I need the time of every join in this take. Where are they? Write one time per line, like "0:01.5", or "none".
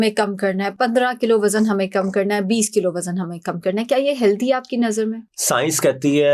none